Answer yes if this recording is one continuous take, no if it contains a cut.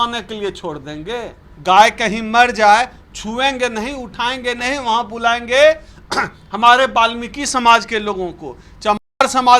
no